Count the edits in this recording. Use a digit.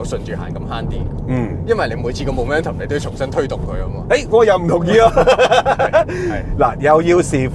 0